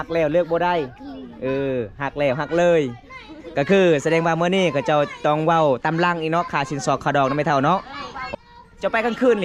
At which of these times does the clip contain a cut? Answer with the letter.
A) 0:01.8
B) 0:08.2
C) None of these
B